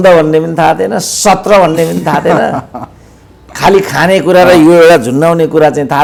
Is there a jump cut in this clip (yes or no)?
no